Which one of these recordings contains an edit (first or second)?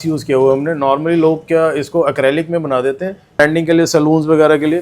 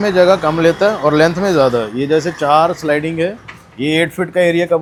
first